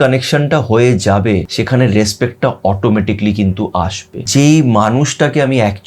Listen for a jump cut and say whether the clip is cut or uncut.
cut